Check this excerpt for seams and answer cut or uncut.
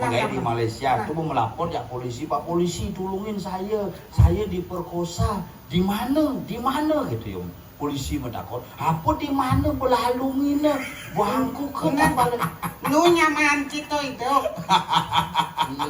uncut